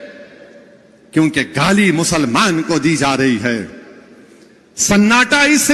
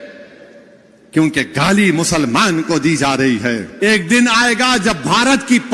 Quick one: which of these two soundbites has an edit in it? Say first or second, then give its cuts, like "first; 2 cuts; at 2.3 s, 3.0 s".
second; 1 cut; at 3.7 s